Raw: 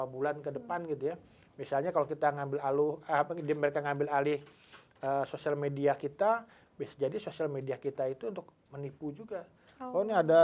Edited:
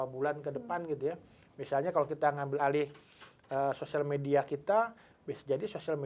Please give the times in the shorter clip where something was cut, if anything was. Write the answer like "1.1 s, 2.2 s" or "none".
2.6 s